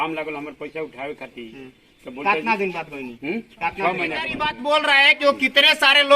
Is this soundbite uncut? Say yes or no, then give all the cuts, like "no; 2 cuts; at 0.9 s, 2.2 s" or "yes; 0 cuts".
no; 1 cut; at 4.4 s